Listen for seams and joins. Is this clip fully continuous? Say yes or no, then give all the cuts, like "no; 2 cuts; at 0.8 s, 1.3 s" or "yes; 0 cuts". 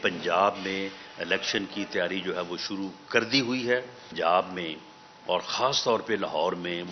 no; 1 cut; at 4.1 s